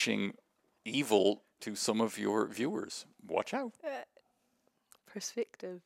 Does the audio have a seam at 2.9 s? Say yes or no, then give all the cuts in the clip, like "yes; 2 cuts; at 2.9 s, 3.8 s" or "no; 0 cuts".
no; 0 cuts